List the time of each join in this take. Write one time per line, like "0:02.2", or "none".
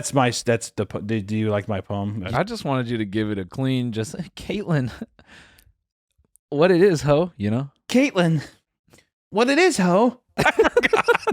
0:02.2
0:10.4